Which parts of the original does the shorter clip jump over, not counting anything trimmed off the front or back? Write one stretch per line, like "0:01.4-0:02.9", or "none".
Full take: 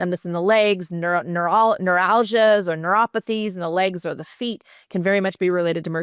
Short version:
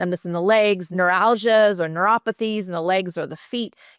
0:00.9-0:01.8